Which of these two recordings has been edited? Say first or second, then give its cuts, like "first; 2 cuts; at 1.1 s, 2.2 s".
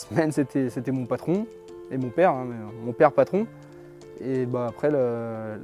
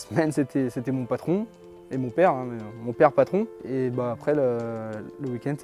second; 1 cut; at 3.6 s